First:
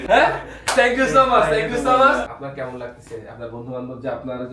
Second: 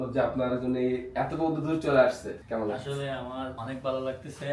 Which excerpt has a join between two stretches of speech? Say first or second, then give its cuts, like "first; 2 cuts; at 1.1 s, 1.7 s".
first; 1 cut; at 2.4 s